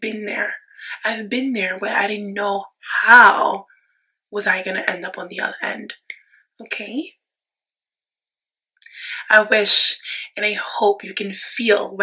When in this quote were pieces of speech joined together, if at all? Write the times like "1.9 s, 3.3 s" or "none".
none